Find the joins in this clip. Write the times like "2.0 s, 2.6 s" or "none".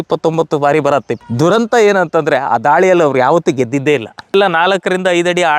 1.1 s, 4.3 s